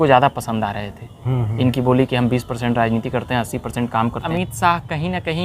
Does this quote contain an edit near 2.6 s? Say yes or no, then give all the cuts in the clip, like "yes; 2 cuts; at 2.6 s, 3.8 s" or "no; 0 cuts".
no; 1 cut; at 4.2 s